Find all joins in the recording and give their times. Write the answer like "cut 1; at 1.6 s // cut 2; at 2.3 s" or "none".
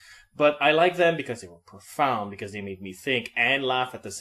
cut 1; at 0.9 s